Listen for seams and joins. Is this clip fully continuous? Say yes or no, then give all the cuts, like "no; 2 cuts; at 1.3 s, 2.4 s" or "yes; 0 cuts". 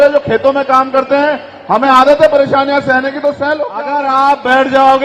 no; 1 cut; at 3.8 s